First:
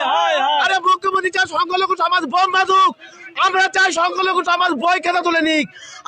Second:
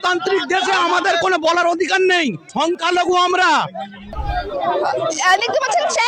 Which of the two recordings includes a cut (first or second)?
second